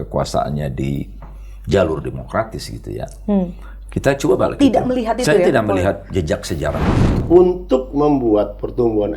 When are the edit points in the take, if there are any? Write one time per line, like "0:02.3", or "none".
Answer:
0:07.1